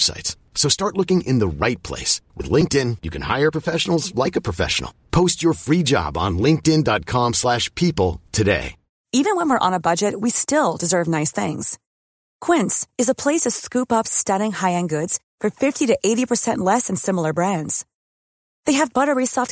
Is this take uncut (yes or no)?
yes